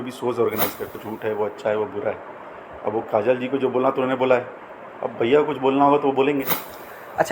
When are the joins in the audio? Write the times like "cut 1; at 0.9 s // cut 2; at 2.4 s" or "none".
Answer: cut 1; at 1.1 s